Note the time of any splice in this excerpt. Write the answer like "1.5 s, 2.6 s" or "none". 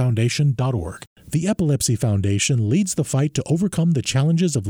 1.0 s